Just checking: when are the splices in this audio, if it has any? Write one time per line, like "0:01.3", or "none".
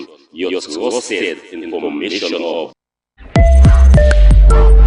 none